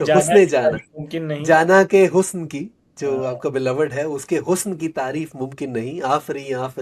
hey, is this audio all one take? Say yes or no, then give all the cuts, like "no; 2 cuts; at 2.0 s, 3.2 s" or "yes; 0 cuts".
yes; 0 cuts